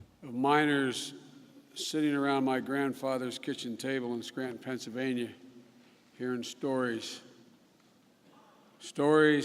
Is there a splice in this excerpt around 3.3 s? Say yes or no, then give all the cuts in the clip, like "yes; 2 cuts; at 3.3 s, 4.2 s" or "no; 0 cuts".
yes; 1 cut; at 3.3 s